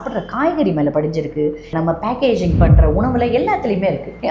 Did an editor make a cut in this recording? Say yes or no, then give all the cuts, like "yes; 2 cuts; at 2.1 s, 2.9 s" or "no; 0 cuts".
yes; 1 cut; at 1.7 s